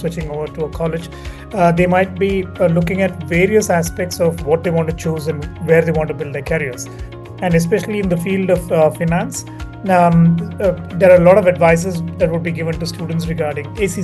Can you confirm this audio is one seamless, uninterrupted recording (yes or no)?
yes